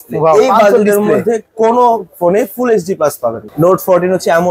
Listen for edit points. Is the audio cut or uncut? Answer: cut